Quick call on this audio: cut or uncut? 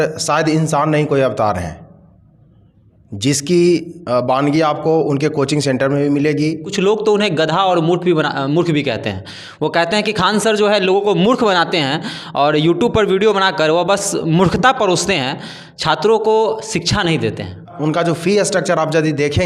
cut